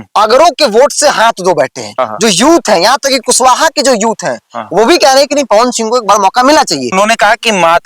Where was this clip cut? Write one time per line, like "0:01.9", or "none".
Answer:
0:01.8
0:06.9